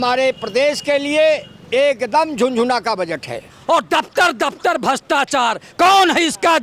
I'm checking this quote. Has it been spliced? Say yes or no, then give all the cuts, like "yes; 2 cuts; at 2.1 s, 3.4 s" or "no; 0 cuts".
yes; 1 cut; at 3.5 s